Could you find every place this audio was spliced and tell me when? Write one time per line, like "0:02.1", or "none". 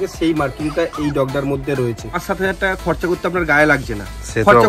0:02.2